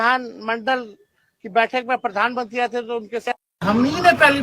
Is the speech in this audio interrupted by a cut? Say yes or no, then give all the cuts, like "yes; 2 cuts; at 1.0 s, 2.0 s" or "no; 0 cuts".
no; 0 cuts